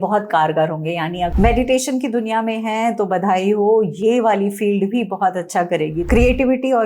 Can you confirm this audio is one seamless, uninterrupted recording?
no; 2 cuts; at 1.3 s, 6.1 s

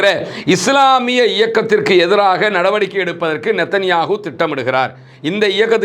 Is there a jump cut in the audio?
no; 0 cuts

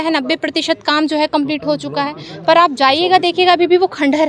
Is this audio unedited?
yes; 0 cuts

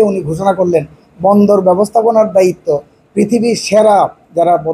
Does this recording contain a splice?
no; 0 cuts

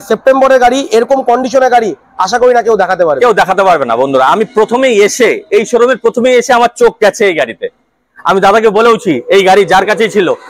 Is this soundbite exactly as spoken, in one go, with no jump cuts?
yes; 0 cuts

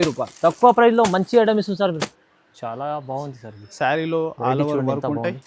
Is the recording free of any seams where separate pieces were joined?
no; 1 cut; at 2.2 s

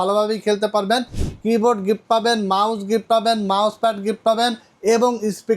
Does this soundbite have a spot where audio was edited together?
yes; 1 cut; at 1.3 s

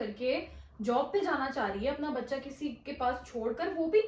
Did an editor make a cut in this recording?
no; 0 cuts

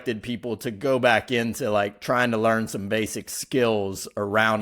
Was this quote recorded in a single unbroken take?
yes; 0 cuts

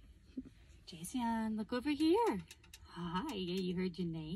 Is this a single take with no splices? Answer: yes; 0 cuts

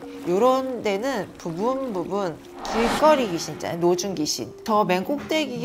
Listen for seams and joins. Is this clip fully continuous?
no; 1 cut; at 4.6 s

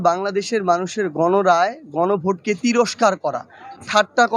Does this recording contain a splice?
no; 0 cuts

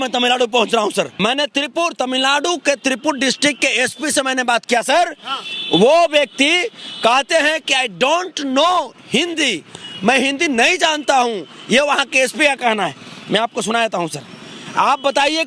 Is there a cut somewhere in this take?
yes; 1 cut; at 1.1 s

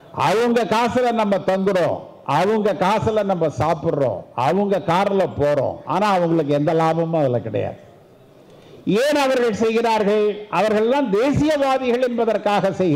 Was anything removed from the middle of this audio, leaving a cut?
no; 0 cuts

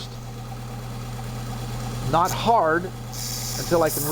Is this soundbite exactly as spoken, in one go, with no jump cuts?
yes; 0 cuts

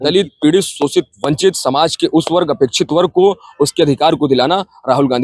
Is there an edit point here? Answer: no; 0 cuts

